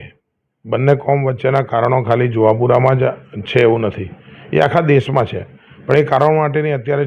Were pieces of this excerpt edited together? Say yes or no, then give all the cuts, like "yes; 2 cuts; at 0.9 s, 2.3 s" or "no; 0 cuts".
no; 0 cuts